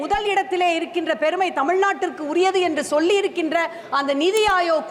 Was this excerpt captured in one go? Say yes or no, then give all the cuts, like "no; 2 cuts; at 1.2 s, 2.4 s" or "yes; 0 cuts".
yes; 0 cuts